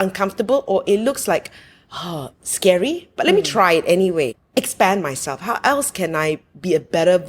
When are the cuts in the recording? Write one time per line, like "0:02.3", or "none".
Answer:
0:04.4